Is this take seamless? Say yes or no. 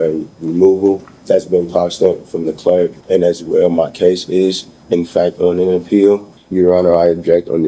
no